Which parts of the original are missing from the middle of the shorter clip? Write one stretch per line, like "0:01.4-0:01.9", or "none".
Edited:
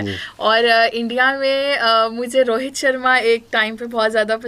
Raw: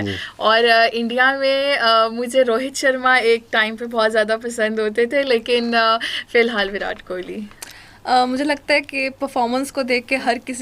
none